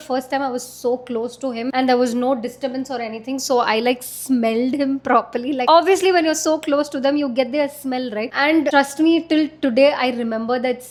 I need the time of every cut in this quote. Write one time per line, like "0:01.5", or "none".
none